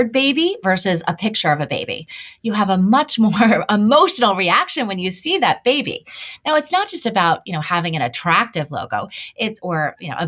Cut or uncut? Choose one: uncut